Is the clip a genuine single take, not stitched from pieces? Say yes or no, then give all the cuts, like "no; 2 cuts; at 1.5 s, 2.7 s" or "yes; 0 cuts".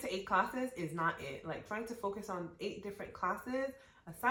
yes; 0 cuts